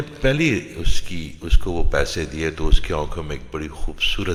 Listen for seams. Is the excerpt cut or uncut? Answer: uncut